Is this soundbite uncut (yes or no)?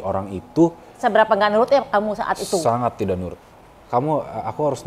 no